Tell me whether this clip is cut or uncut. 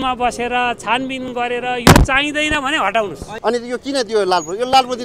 cut